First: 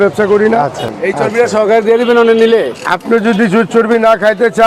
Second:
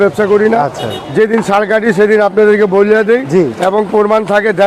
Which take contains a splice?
first; 1 cut; at 1.0 s

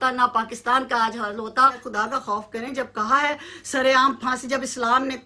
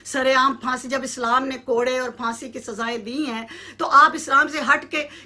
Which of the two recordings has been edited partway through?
first; 1 cut; at 1.8 s

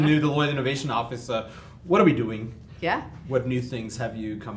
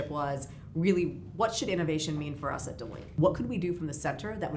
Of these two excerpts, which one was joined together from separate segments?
second; 1 cut; at 3.1 s

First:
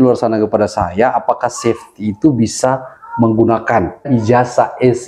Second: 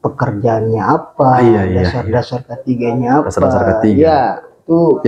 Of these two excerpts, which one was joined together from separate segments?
first; 1 cut; at 4.1 s

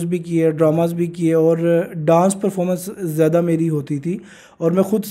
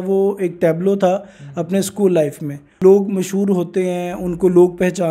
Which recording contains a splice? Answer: second; 1 cut; at 2.8 s

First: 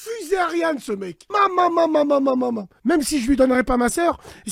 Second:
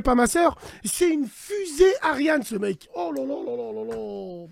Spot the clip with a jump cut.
first; 2 cuts; at 1.2 s, 2.7 s

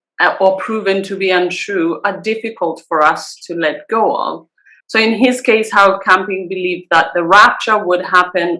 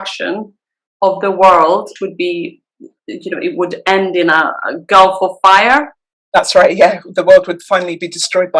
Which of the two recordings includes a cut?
second; 1 cut; at 1.9 s

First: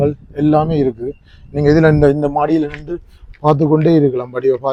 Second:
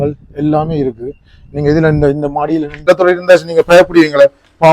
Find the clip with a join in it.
second; 1 cut; at 2.7 s

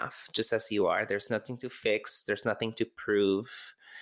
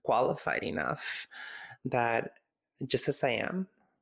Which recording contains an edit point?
second; 1 cut; at 1.8 s

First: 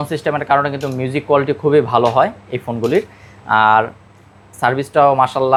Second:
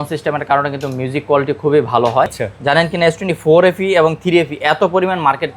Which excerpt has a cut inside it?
second; 1 cut; at 2.4 s

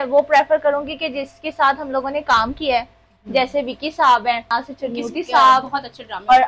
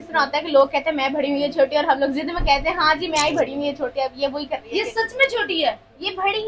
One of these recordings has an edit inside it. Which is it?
first; 1 cut; at 4.5 s

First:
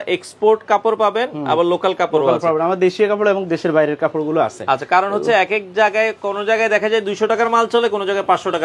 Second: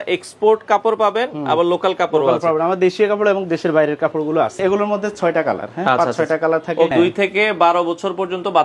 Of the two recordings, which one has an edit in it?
second; 2 cuts; at 4.6 s, 6.9 s

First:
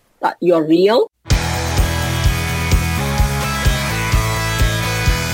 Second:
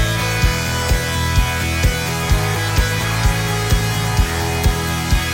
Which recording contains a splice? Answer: first; 1 cut; at 1.2 s

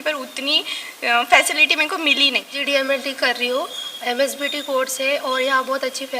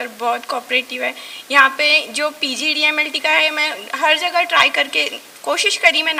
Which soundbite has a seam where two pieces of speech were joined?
first; 1 cut; at 2.5 s

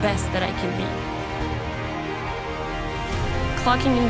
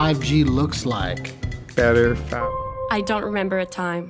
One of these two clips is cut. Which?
second; 1 cut; at 2.3 s

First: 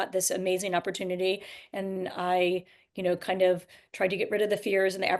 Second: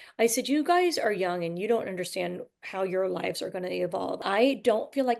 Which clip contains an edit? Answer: second; 1 cut; at 4.2 s

